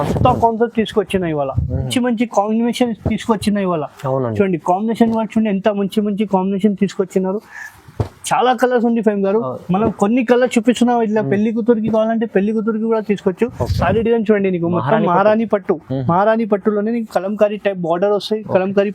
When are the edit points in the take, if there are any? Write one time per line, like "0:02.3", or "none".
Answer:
0:01.9
0:13.6